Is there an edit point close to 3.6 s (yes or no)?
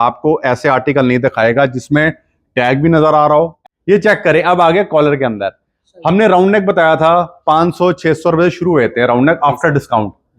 yes